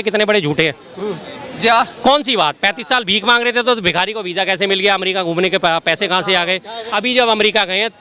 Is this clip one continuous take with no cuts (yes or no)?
no